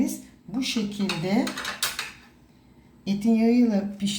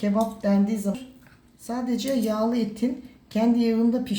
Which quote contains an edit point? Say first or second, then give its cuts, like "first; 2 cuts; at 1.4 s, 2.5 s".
second; 1 cut; at 1.0 s